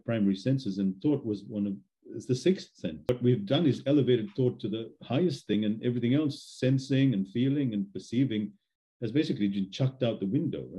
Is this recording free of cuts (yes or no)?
no